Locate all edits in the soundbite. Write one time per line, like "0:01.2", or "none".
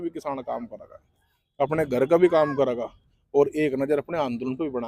none